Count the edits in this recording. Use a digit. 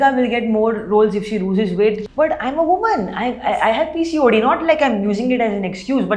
1